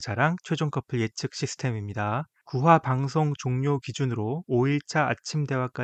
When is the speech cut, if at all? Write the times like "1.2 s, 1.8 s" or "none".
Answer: 2.4 s